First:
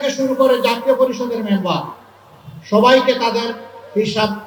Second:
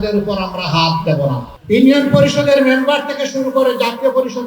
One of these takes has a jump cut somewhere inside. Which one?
second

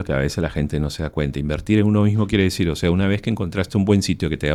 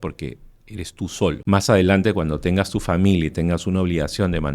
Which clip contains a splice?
second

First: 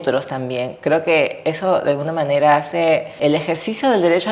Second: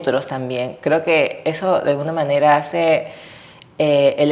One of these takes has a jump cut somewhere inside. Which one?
first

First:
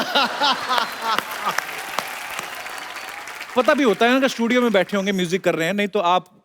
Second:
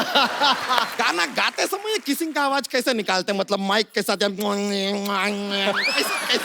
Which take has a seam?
second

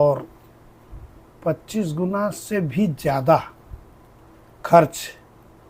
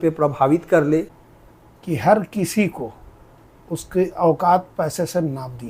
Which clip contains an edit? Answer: second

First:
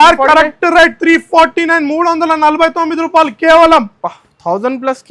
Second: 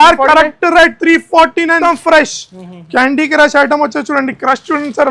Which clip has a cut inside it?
second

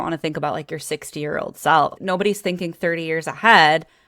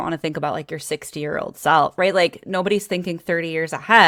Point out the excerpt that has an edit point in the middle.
first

